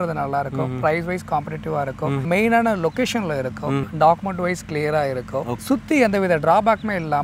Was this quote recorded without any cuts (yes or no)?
no